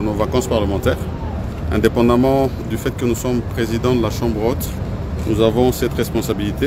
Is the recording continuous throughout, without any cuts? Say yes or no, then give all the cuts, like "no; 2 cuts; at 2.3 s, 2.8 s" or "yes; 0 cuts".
yes; 0 cuts